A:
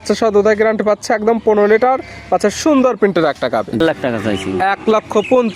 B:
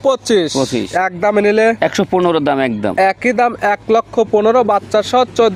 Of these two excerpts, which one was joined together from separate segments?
A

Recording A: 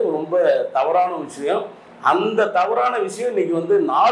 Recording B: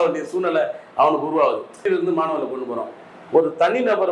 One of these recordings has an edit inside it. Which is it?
B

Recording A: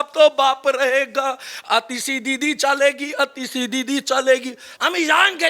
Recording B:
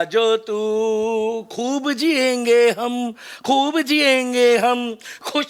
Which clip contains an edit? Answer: A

